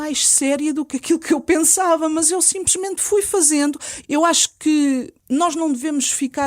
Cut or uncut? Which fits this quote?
cut